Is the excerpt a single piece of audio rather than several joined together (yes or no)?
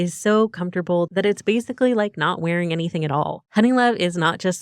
no